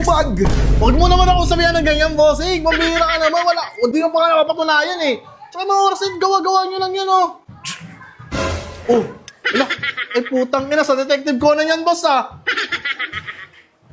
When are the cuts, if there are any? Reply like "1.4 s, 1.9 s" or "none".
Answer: none